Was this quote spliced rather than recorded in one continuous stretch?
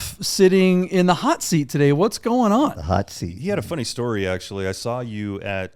no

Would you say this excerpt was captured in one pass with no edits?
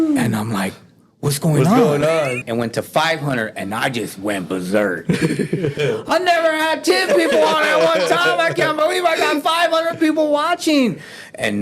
no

